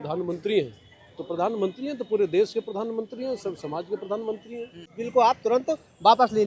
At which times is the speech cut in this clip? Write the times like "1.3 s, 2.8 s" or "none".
5.0 s

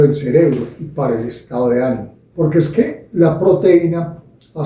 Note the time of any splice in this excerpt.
2.2 s

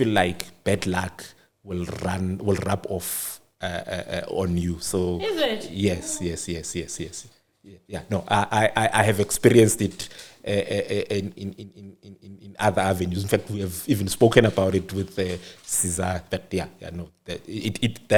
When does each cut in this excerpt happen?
none

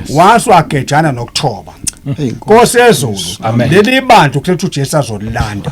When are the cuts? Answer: none

